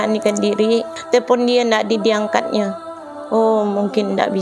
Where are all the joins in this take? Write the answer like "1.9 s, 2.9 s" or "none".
1.0 s